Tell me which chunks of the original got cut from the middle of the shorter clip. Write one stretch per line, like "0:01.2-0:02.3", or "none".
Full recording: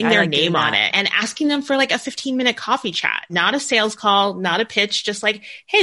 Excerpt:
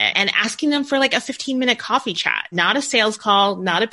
none